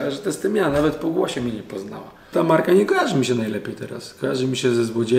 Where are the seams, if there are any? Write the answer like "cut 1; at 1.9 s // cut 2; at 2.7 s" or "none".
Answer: cut 1; at 2.3 s